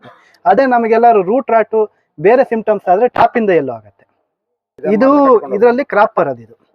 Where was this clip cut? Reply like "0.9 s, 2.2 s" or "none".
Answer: 4.7 s